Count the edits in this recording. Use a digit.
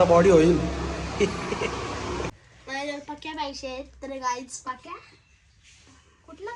1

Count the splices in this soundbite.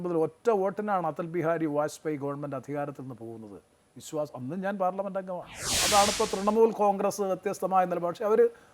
1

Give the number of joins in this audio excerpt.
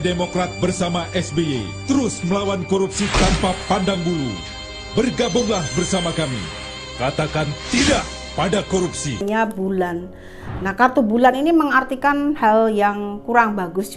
1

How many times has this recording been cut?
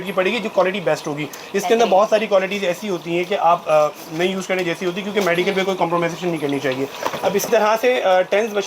0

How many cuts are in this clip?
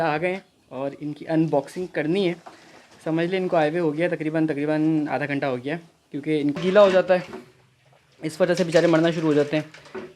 1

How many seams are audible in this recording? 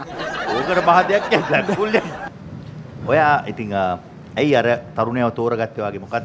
1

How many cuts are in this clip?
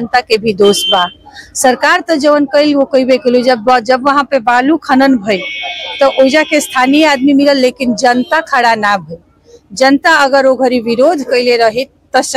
0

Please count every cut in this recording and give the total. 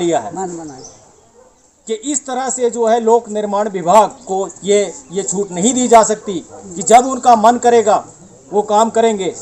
0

